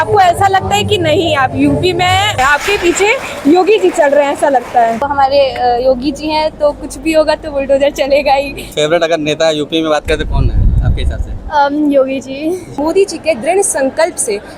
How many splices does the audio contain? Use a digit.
4